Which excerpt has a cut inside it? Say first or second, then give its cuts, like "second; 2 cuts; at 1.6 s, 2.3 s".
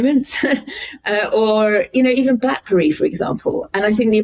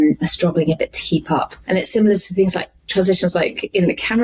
second; 1 cut; at 1.6 s